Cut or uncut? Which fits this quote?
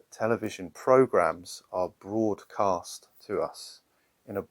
uncut